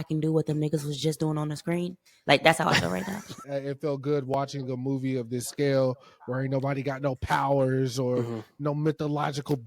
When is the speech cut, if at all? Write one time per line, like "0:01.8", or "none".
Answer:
0:03.5